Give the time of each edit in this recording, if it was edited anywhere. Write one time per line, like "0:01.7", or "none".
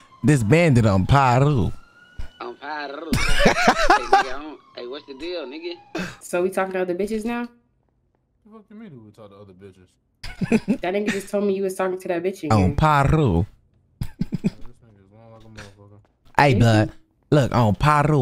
0:06.2

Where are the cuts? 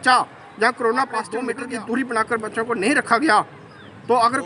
0:01.5

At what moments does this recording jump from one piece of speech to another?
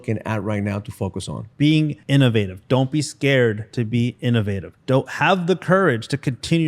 0:01.9
0:03.6
0:04.7

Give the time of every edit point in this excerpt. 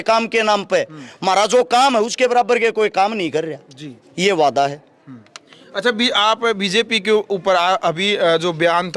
none

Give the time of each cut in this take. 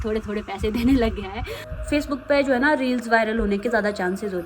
0:01.7

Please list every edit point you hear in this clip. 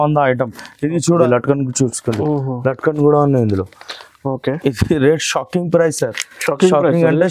0:01.2

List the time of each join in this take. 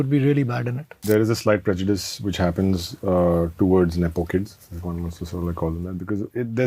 0:01.0

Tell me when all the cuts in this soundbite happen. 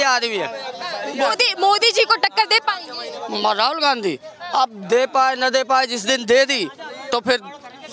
none

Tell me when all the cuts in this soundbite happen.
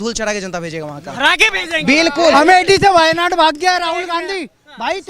0:02.3

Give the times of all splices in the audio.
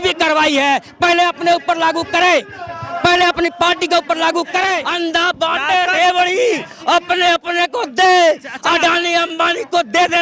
0:04.9

